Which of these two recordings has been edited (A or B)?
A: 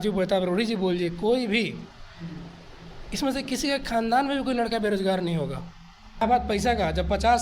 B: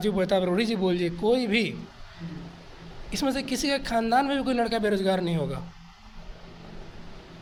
A